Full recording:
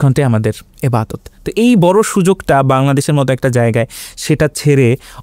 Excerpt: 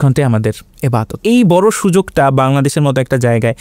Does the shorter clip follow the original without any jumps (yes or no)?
no